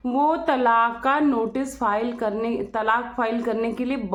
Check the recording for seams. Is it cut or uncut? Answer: uncut